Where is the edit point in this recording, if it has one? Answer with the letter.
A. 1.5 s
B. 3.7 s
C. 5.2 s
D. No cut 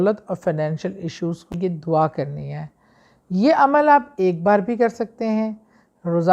A